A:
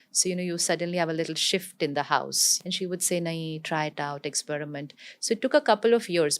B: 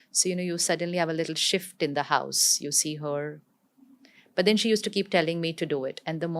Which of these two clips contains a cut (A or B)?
A